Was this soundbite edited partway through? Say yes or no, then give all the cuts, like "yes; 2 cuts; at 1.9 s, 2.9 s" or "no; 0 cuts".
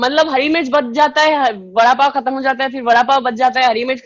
no; 0 cuts